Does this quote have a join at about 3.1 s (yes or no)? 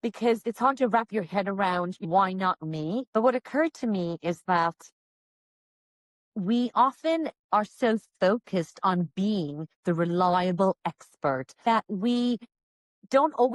yes